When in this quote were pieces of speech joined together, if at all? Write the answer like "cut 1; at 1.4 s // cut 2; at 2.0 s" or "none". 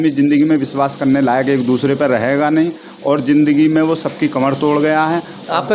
none

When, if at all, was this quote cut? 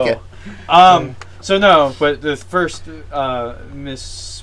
none

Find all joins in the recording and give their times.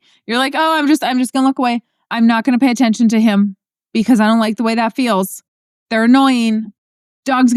none

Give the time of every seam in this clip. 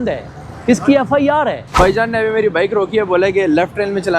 cut 1; at 1.8 s

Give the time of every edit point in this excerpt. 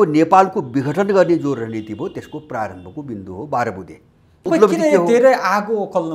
cut 1; at 4.5 s

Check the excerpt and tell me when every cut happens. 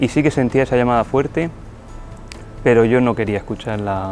none

